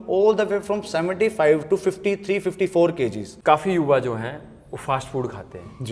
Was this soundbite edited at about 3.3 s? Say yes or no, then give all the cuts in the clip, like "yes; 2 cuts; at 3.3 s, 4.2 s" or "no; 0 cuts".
yes; 1 cut; at 3.3 s